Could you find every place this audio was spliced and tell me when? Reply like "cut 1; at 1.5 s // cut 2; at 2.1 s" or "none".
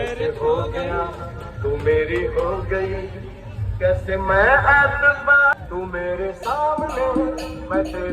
cut 1; at 5.5 s